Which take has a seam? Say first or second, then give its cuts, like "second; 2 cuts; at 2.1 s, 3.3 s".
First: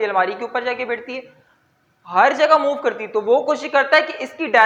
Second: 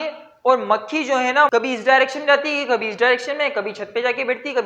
second; 1 cut; at 1.5 s